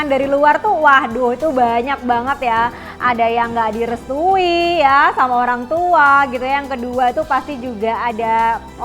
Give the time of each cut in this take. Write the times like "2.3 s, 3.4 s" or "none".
none